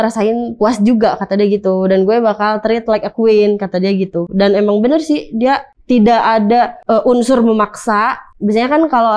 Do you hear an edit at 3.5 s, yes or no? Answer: no